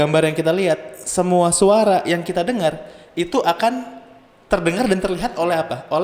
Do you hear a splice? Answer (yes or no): no